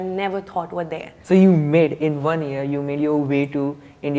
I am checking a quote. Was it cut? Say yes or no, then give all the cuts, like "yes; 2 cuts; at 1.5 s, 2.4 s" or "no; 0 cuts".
yes; 1 cut; at 1.1 s